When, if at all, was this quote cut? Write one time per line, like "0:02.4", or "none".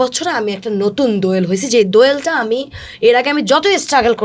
none